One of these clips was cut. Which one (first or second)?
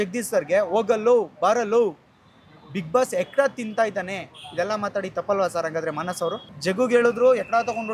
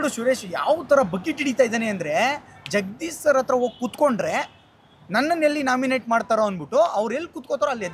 first